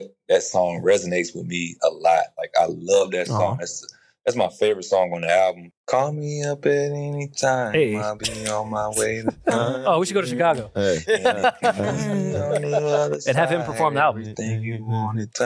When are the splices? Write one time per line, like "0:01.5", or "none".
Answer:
0:05.6